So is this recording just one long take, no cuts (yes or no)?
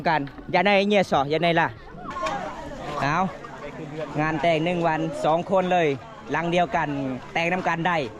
no